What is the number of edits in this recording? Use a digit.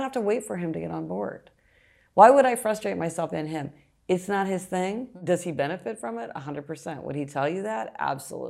1